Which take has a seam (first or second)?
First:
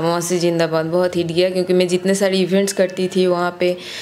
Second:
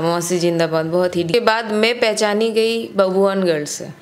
second